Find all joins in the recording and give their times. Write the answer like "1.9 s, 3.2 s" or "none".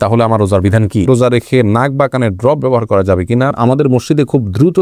1.1 s, 3.5 s